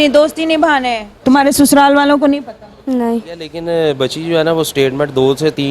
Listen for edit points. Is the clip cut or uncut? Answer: cut